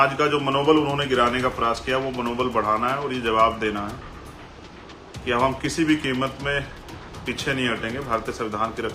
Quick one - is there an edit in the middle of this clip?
no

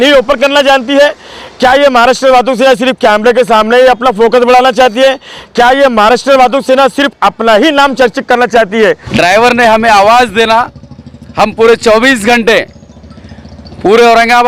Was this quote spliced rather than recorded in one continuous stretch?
yes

